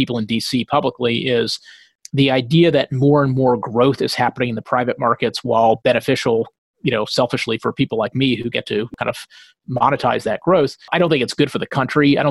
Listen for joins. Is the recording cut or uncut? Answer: cut